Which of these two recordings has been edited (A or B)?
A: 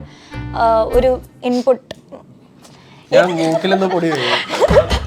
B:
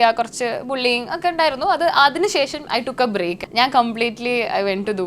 B